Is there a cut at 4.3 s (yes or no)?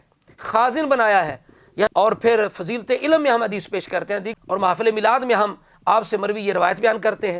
yes